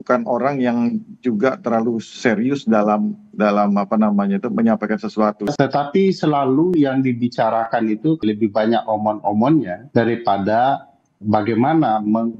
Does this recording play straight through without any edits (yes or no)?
no